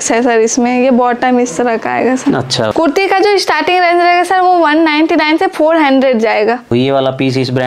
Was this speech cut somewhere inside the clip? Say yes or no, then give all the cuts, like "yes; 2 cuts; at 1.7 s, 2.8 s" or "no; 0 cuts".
yes; 2 cuts; at 2.7 s, 6.7 s